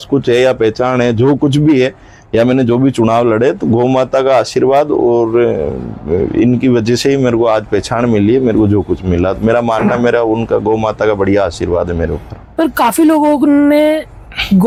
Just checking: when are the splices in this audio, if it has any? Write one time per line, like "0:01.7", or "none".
none